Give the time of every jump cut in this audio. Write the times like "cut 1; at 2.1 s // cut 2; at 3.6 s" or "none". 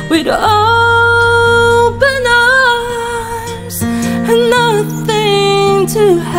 none